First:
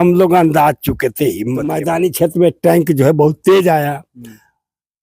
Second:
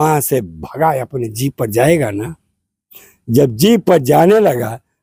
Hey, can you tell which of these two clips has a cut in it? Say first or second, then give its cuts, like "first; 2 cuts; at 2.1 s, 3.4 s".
first; 1 cut; at 1.8 s